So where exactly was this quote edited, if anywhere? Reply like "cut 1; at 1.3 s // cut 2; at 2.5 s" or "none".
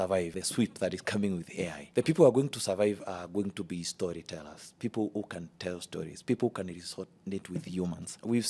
none